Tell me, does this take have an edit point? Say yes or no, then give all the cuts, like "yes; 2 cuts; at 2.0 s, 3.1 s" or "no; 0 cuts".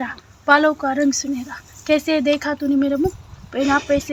no; 0 cuts